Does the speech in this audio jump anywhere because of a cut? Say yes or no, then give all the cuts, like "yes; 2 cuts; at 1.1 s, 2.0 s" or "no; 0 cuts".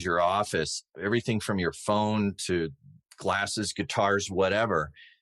no; 0 cuts